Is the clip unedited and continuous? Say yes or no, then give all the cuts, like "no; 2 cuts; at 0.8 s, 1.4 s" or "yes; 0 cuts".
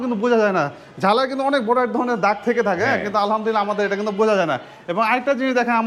yes; 0 cuts